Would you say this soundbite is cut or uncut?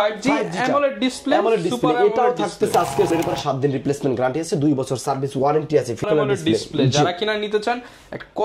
cut